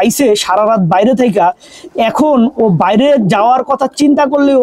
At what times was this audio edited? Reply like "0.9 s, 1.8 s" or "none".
none